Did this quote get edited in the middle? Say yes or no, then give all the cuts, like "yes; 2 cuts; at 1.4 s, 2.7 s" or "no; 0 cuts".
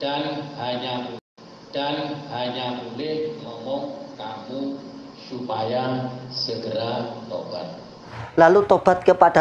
yes; 1 cut; at 8.2 s